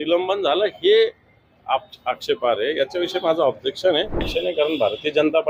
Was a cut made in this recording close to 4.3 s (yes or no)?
yes